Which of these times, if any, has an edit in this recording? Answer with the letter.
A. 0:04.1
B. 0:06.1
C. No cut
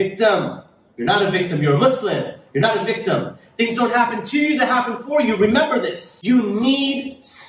B